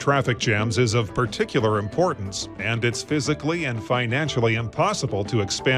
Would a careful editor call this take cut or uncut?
uncut